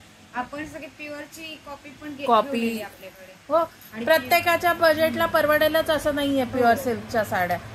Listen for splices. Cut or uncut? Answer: uncut